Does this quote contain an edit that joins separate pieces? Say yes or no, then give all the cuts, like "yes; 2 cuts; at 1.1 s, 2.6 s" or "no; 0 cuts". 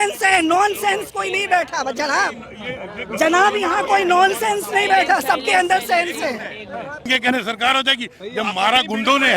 yes; 1 cut; at 7.1 s